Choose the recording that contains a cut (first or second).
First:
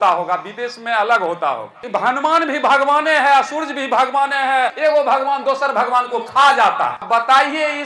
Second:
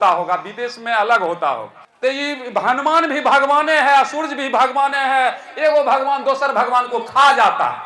first